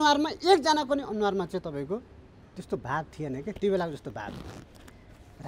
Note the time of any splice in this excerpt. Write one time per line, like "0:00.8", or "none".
none